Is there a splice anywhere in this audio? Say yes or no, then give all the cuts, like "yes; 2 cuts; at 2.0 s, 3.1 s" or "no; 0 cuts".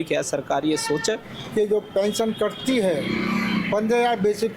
yes; 1 cut; at 1.3 s